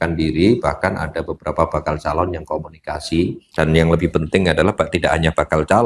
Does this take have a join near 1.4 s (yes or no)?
no